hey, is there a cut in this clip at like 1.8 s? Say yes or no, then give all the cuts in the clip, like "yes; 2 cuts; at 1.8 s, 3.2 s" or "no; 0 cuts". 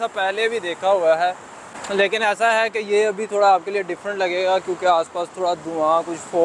no; 0 cuts